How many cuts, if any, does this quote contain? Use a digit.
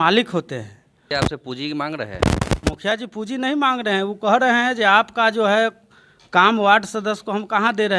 1